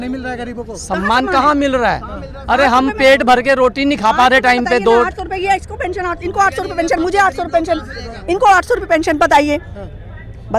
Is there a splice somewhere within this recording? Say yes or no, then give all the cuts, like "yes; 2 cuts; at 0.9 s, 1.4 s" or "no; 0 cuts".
no; 0 cuts